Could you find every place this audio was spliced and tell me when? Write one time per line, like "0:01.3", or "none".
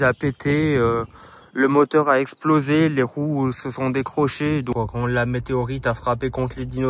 0:04.7